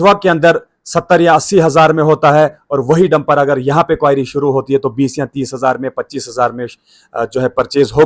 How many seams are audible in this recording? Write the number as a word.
zero